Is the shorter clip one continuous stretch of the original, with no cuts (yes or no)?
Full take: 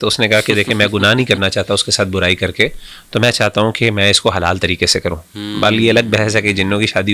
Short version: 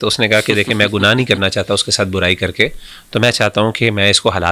yes